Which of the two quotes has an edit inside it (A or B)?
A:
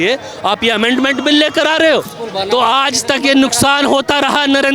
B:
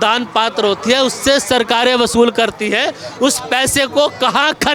A